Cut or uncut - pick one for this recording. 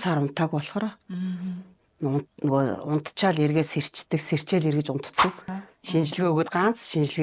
cut